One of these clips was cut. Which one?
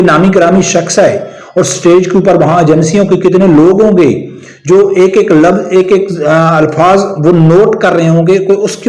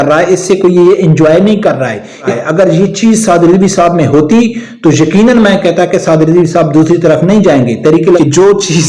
second; 2 cuts; at 2.3 s, 8.2 s

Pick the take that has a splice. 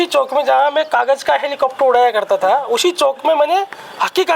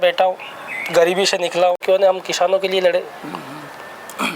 second; 1 cut; at 1.8 s

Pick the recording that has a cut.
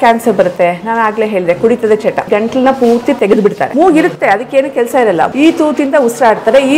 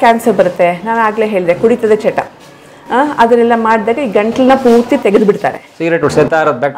first; 3 cuts; at 2.2 s, 3.7 s, 5.3 s

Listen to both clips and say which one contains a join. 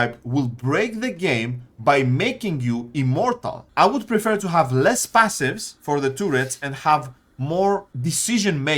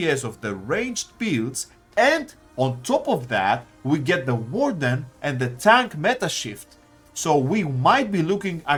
first; 1 cut; at 3.6 s

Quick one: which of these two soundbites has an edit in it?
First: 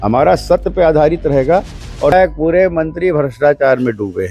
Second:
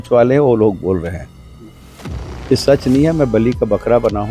first; 1 cut; at 2.1 s

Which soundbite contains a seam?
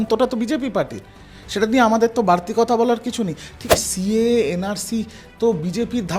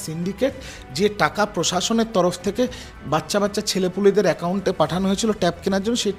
first; 1 cut; at 3.7 s

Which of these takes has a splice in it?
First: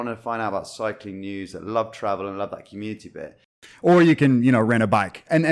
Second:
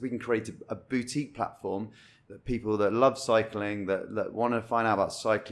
first; 1 cut; at 3.6 s

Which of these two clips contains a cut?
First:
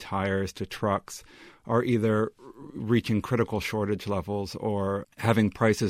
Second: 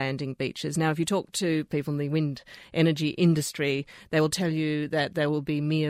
second; 1 cut; at 1.7 s

